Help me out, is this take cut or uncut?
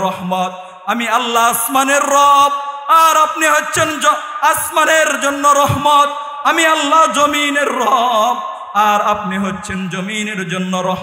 uncut